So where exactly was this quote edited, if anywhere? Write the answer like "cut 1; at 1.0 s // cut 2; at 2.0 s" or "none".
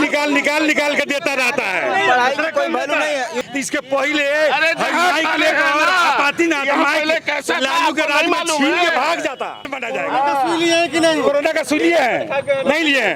cut 1; at 3.3 s // cut 2; at 9.7 s